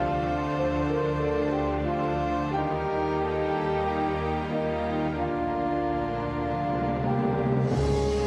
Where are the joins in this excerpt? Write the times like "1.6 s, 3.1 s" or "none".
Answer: none